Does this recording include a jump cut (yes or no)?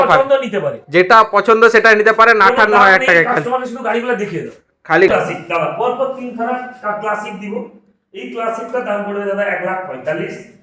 yes